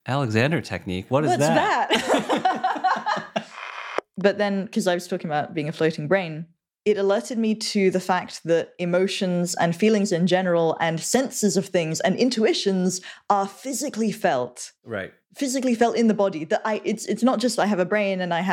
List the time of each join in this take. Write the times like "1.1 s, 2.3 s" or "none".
4.0 s